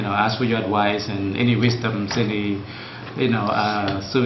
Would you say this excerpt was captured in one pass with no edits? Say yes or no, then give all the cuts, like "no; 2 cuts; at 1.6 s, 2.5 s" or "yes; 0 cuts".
yes; 0 cuts